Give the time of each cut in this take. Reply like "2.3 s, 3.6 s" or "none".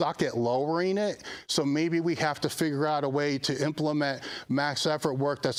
none

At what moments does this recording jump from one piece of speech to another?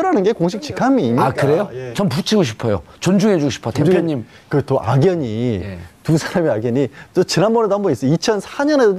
7.5 s

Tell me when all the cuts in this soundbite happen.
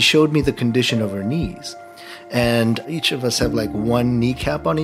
2.9 s

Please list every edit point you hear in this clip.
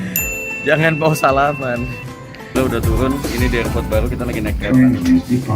2.5 s

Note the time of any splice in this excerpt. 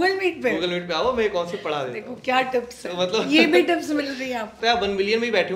4.6 s

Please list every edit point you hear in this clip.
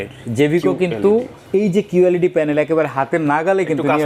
none

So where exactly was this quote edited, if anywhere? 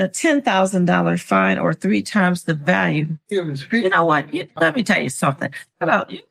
none

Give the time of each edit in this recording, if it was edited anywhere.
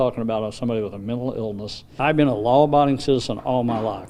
none

